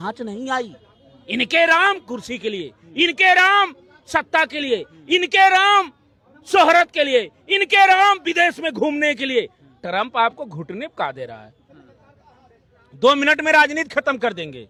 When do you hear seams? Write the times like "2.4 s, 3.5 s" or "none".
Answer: none